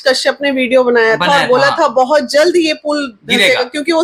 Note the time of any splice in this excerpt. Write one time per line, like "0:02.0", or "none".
none